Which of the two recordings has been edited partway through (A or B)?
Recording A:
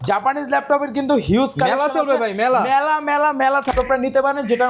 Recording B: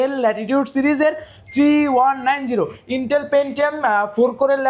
A